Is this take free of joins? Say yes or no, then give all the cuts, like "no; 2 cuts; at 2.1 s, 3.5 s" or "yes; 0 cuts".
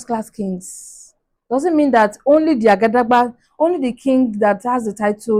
yes; 0 cuts